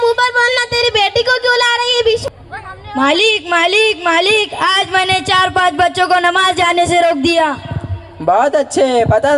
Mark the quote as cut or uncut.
cut